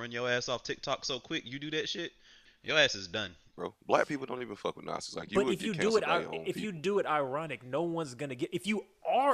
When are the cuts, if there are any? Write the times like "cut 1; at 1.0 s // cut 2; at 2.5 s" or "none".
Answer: cut 1; at 2.5 s // cut 2; at 3.5 s